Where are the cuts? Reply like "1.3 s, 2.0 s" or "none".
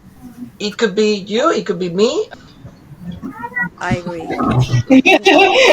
2.3 s